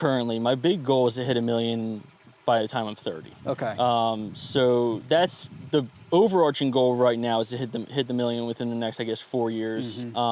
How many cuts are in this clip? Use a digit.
0